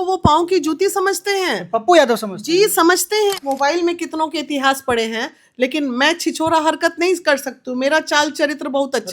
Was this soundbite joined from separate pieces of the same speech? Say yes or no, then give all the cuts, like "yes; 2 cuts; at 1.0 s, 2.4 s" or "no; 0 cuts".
yes; 1 cut; at 3.4 s